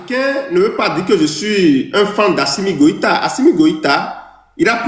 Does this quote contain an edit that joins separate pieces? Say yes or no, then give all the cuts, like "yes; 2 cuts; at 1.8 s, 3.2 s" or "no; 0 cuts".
no; 0 cuts